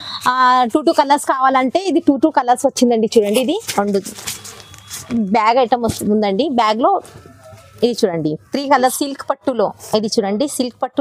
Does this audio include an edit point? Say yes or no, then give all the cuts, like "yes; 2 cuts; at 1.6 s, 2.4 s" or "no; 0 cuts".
yes; 1 cut; at 8.8 s